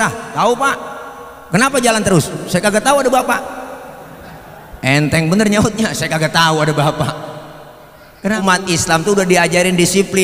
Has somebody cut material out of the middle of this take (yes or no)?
yes